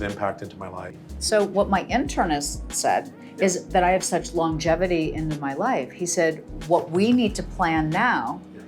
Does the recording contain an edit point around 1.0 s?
yes; 1 cut; at 1.0 s

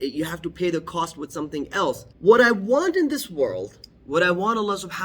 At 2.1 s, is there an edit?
yes; 1 cut; at 2.1 s

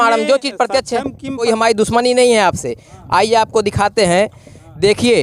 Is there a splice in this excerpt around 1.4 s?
yes; 1 cut; at 1.4 s

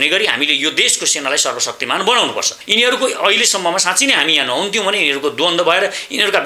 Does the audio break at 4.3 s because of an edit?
no; 1 cut; at 2.6 s

